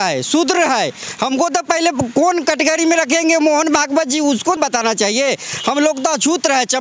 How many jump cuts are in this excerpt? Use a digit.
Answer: 1